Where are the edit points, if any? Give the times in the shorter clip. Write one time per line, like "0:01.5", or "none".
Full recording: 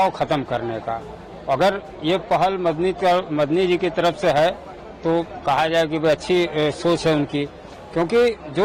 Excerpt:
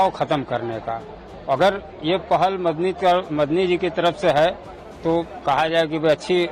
none